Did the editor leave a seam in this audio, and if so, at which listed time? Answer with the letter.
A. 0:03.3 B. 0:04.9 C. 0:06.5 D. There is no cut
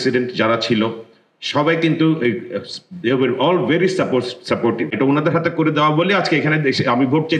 B